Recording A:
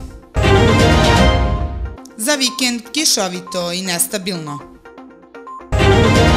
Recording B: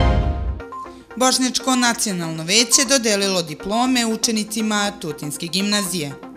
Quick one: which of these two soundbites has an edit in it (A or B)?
A